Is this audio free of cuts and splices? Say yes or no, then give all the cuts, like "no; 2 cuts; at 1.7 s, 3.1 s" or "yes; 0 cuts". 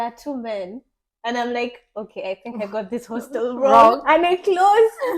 yes; 0 cuts